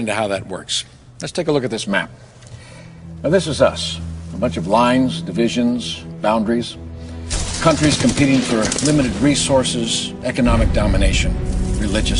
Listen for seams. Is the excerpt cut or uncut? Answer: uncut